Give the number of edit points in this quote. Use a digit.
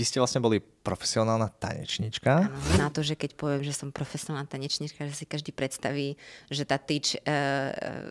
1